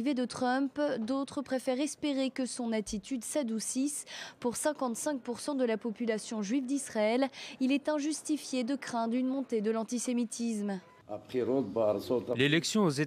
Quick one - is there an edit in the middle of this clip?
yes; 1 cut; at 3.2 s

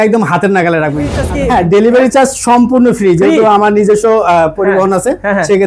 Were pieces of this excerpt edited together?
yes; 1 cut; at 1.2 s

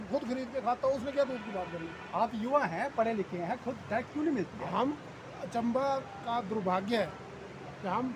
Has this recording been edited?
no; 0 cuts

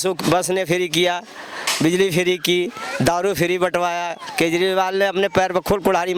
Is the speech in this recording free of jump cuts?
yes; 0 cuts

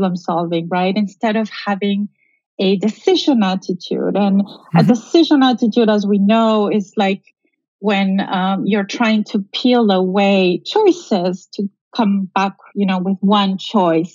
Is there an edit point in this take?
no; 0 cuts

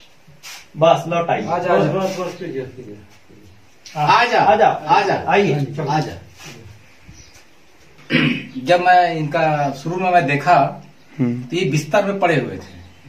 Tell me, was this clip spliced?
yes; 1 cut; at 7.9 s

